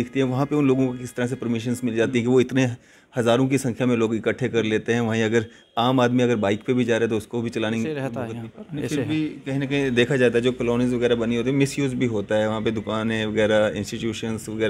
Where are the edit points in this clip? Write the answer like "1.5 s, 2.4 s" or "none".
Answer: 8.1 s